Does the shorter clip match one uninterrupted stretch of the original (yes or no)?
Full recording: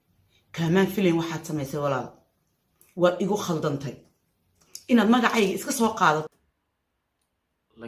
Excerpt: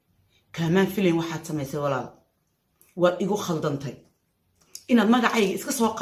yes